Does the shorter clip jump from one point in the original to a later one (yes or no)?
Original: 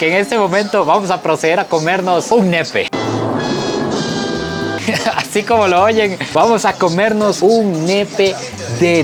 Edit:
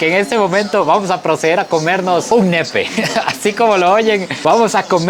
yes